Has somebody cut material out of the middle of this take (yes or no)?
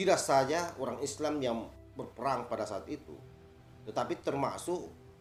no